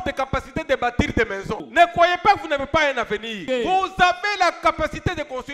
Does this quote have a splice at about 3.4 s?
yes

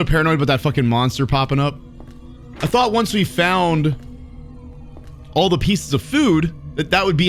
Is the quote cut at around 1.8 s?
no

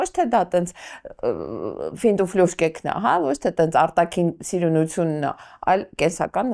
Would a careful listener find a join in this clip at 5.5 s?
no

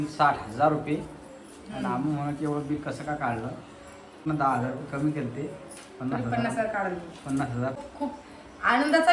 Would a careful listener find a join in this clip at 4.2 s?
yes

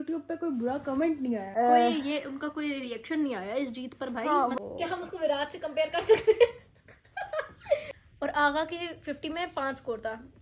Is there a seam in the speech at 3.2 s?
no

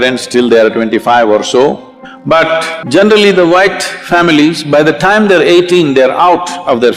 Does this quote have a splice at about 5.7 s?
no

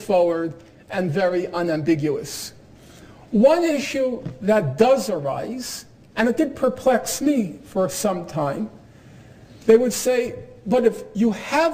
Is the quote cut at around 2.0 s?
yes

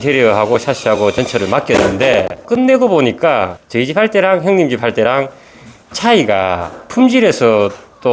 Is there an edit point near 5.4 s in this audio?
no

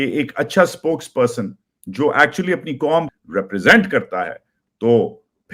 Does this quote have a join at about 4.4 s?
no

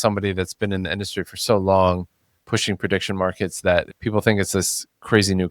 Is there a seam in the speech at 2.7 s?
no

